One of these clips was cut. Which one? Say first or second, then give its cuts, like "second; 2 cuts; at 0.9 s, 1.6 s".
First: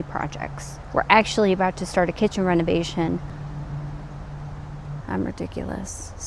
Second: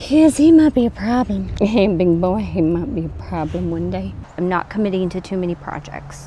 second; 2 cuts; at 1.5 s, 4.3 s